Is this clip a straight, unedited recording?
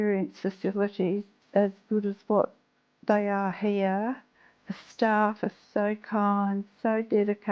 no; 1 cut; at 1.4 s

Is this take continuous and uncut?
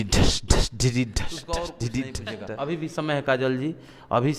no; 1 cut; at 2.9 s

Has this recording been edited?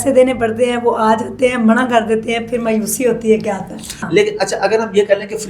yes; 1 cut; at 4.1 s

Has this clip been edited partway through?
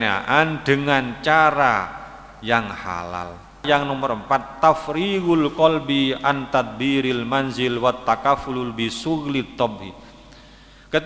yes; 1 cut; at 3.6 s

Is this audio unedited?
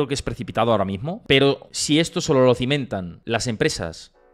no; 3 cuts; at 1.1 s, 1.7 s, 3.1 s

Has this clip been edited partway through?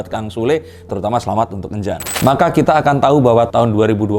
yes; 1 cut; at 2.1 s

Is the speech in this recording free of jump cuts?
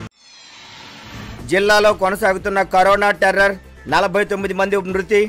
yes; 0 cuts

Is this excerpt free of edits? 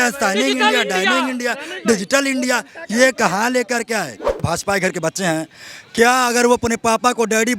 no; 1 cut; at 4.3 s

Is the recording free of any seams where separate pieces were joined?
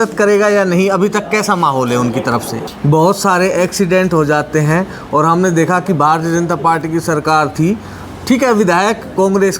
no; 1 cut; at 2.6 s

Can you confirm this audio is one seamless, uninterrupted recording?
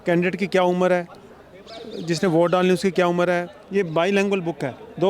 no; 1 cut; at 3.6 s

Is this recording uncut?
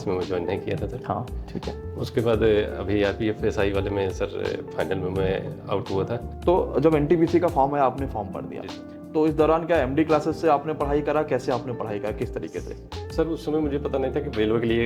no; 1 cut; at 6.3 s

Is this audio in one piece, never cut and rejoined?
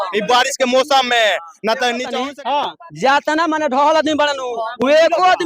no; 1 cut; at 2.1 s

